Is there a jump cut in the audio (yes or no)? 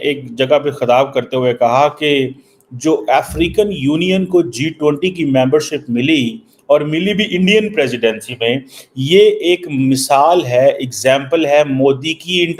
no